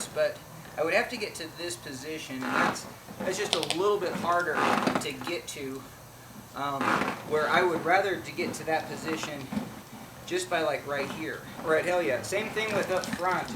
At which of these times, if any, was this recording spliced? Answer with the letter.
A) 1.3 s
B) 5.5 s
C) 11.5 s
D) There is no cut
C